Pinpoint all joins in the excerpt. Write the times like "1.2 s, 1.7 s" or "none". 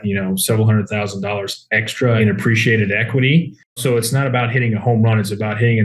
2.2 s, 3.8 s